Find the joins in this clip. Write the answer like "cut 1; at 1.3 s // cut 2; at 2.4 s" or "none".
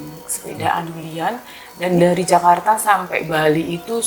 cut 1; at 1.0 s